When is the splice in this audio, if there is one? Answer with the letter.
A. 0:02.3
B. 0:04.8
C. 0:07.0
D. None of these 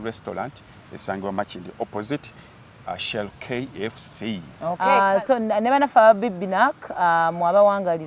B